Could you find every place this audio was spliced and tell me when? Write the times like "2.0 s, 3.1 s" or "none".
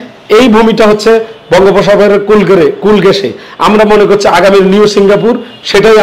none